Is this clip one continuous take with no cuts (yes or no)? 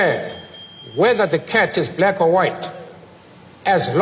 yes